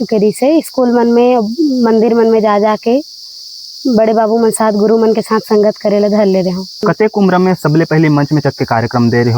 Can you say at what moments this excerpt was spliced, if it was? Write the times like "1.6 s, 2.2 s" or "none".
6.8 s